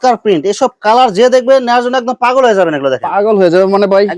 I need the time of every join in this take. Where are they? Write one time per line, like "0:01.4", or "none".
none